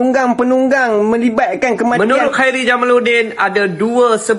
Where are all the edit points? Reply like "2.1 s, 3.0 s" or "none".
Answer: 2.0 s